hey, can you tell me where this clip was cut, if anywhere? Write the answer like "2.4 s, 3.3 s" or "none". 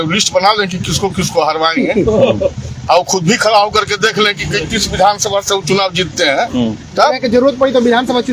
none